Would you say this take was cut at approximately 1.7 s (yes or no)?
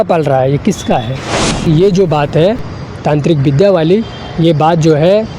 yes